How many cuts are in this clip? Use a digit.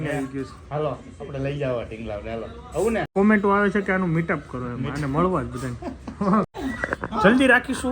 2